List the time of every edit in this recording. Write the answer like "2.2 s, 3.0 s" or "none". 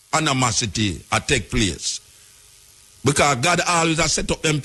none